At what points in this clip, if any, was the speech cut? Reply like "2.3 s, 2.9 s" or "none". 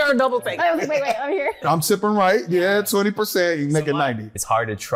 none